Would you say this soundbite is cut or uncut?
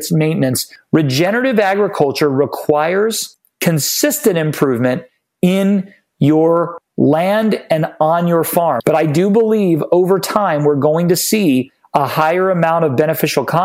cut